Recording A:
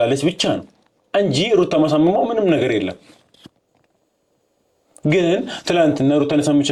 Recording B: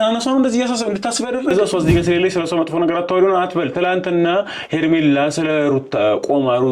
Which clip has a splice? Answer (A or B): B